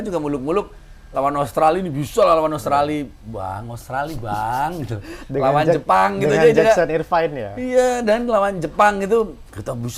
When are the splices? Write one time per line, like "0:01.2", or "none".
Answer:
none